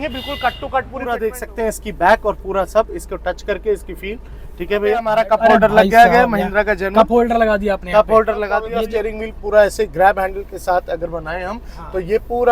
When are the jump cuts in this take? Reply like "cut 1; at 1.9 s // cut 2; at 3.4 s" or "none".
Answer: cut 1; at 1.2 s // cut 2; at 5.2 s // cut 3; at 8.7 s